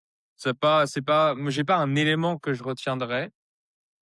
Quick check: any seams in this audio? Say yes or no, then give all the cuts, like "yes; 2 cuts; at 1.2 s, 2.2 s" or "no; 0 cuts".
no; 0 cuts